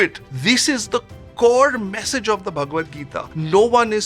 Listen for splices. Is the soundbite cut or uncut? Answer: uncut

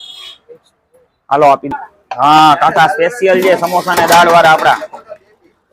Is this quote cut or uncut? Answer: cut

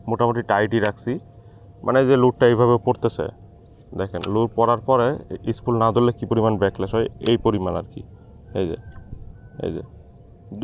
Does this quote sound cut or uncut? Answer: uncut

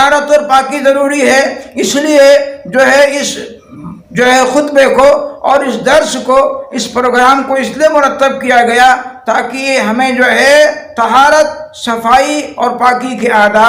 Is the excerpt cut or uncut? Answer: uncut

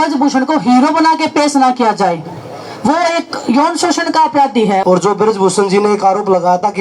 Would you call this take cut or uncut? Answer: cut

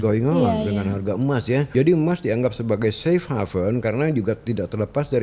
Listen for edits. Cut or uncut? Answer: cut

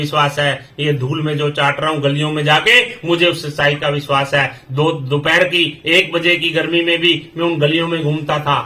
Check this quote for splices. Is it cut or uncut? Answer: uncut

